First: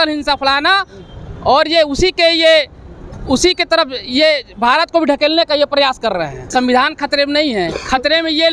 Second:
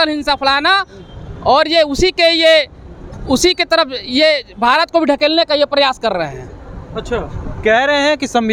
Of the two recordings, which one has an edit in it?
first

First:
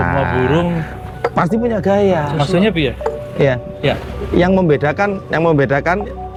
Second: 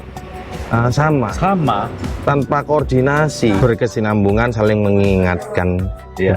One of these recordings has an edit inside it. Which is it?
second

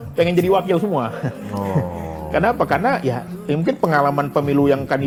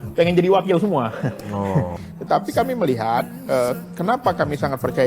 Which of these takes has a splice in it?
second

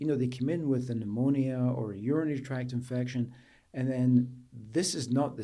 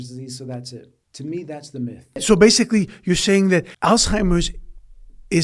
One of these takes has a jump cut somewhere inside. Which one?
second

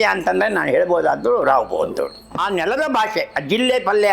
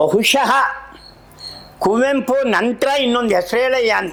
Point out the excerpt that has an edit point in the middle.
first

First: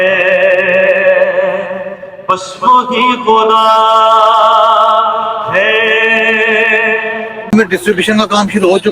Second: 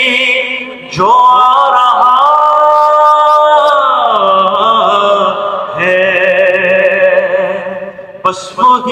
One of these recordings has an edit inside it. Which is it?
first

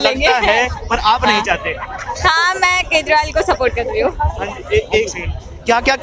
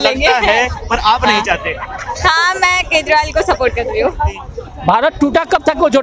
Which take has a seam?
second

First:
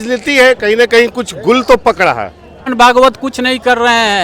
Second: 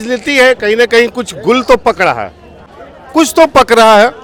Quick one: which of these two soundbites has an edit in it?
first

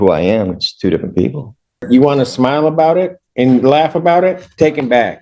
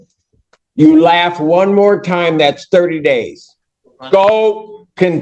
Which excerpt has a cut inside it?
first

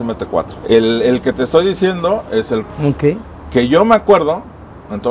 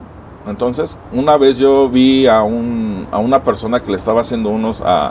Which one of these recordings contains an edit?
first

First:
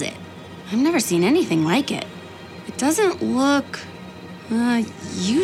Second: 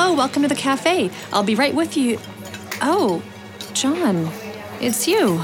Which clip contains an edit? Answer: first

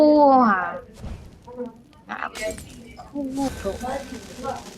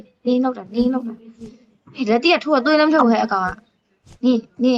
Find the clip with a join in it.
first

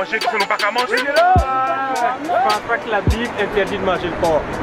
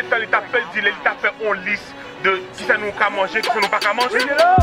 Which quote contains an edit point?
first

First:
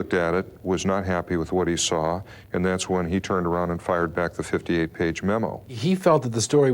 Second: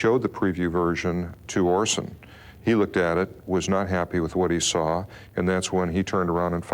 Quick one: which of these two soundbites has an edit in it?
first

